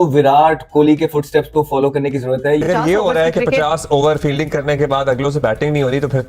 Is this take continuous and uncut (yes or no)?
no